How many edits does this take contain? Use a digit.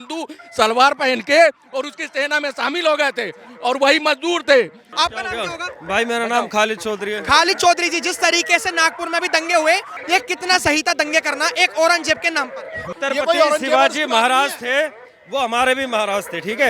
3